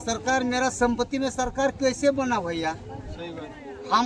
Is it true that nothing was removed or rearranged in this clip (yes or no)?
yes